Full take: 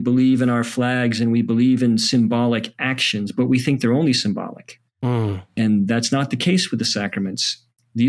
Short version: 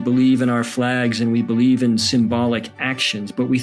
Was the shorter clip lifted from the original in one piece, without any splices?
yes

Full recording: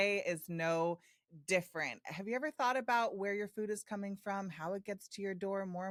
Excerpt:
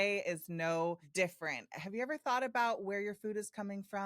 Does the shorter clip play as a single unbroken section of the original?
no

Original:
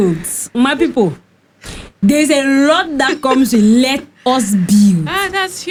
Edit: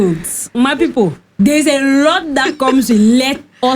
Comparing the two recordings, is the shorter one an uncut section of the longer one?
no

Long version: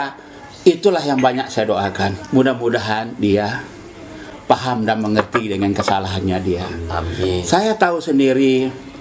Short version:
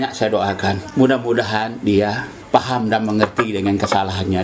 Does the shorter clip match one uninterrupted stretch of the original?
no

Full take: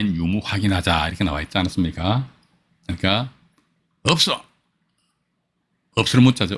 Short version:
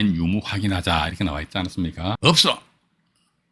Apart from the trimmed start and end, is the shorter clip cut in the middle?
yes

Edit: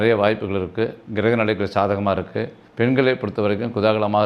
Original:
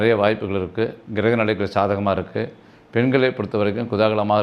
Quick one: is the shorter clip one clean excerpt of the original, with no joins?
no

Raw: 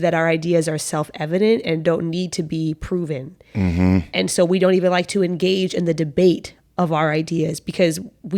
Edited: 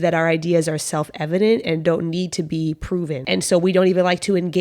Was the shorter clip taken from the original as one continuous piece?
no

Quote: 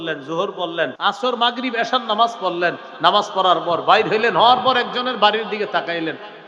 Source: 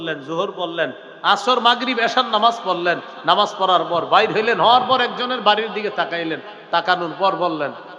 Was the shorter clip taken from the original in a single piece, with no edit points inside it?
no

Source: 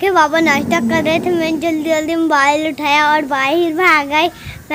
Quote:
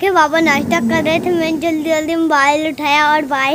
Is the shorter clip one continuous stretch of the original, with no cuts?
yes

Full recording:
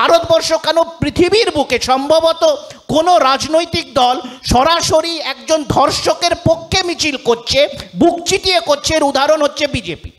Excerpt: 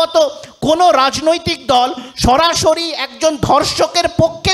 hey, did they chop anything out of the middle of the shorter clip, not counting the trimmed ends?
no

